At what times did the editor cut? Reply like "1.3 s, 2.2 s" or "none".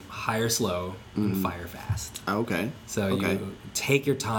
none

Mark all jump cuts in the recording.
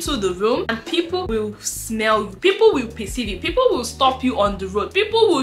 0.9 s

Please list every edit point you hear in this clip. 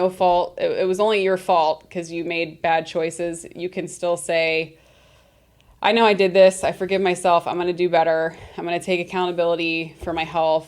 none

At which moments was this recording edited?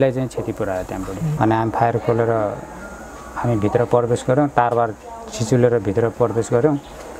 1.3 s

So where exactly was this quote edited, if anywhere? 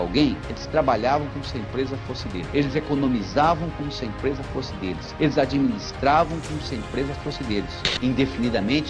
7.9 s

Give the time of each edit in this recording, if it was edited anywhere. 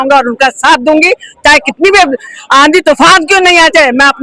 none

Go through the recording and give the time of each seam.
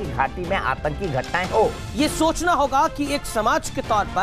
1.8 s

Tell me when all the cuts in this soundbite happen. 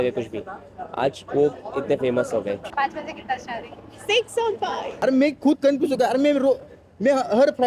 2.7 s, 4.8 s

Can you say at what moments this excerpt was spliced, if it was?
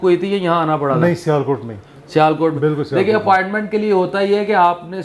none

